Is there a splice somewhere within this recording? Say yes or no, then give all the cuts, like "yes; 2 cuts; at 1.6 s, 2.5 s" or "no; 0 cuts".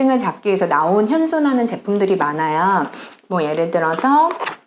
no; 0 cuts